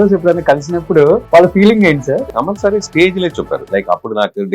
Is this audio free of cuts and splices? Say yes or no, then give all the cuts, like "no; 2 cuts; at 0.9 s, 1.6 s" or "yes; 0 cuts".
no; 3 cuts; at 1.2 s, 2.3 s, 3.6 s